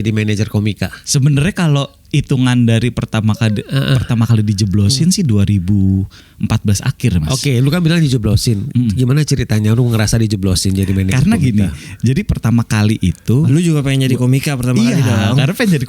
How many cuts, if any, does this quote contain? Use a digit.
2